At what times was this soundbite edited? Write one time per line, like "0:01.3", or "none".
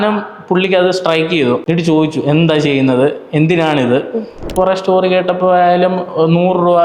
0:01.6
0:04.5